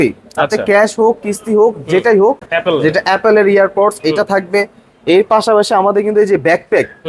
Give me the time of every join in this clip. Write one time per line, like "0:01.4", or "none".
0:02.5